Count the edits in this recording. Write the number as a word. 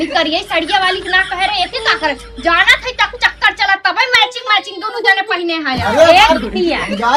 zero